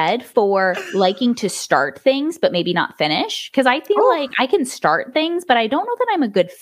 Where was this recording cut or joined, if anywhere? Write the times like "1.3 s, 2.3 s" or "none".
none